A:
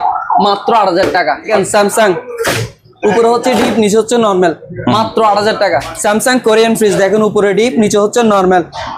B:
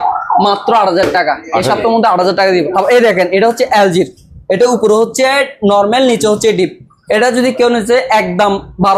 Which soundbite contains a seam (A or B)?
A